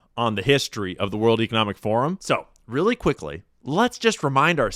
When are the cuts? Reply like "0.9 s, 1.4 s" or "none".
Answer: 2.2 s